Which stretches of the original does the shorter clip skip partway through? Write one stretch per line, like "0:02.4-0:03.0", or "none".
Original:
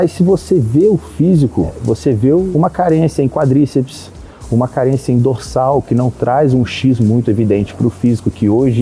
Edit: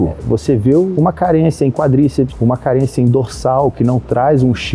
0:03.9-0:04.4